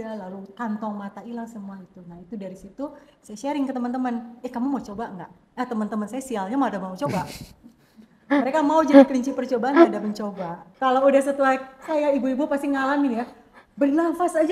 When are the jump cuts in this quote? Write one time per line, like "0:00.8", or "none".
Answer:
0:10.6